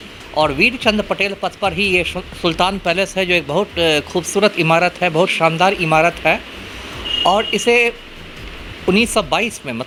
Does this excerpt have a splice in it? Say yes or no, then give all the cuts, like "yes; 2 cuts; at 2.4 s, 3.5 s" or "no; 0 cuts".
no; 0 cuts